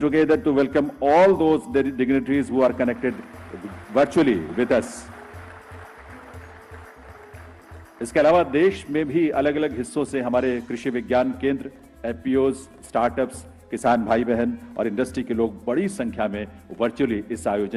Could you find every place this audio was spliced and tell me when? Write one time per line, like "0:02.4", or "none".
none